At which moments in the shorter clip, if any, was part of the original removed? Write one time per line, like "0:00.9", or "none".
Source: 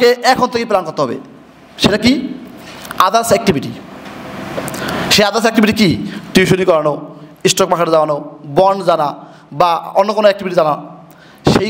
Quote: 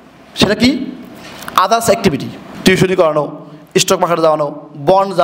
0:02.5